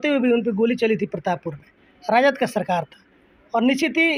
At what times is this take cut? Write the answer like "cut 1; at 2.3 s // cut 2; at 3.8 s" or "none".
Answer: none